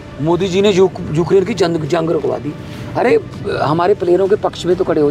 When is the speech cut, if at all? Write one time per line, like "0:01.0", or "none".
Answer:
none